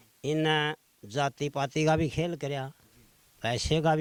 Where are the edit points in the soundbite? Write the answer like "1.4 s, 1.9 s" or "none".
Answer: none